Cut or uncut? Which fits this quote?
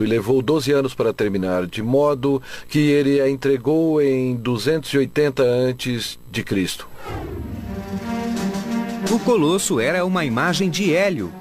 uncut